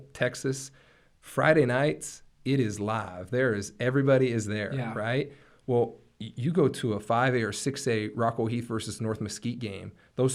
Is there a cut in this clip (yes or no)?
no